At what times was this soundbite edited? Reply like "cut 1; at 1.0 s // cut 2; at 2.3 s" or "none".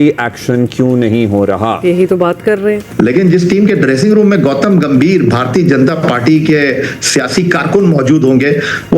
none